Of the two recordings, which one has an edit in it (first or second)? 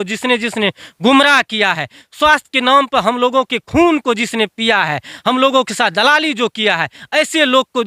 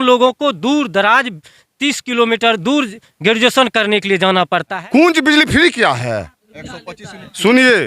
second